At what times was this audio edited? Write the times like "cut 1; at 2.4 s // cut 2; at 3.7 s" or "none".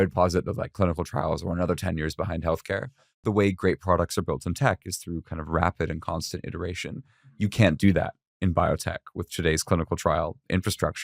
cut 1; at 3.2 s